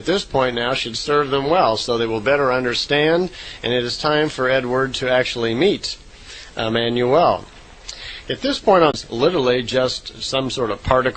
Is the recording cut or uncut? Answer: uncut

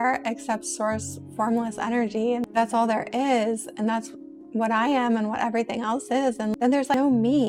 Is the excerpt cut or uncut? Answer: uncut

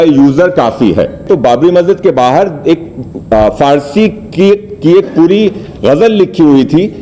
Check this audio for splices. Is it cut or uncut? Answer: cut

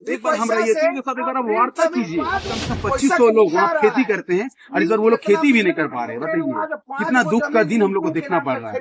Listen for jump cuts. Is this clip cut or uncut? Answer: cut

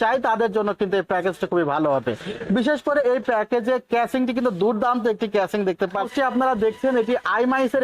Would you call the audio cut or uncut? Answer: cut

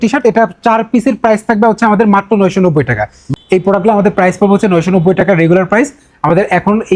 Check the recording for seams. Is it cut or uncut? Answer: cut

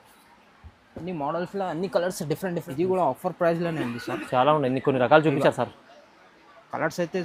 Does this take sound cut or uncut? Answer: cut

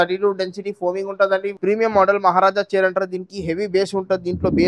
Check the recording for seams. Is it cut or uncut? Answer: cut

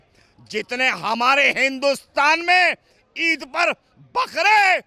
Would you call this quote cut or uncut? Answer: uncut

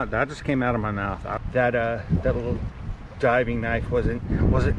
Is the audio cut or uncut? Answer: cut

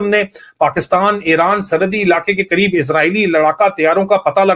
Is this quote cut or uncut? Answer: uncut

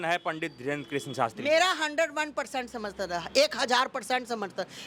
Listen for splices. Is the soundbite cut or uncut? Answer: uncut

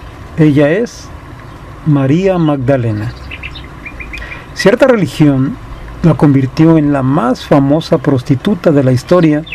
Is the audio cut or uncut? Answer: cut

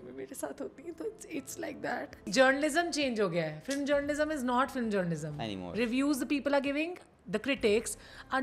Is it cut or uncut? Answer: cut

